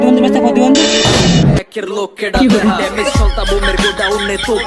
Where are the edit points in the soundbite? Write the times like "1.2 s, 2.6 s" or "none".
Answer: 1.1 s